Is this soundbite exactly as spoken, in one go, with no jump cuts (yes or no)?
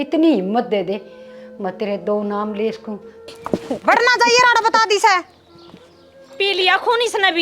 no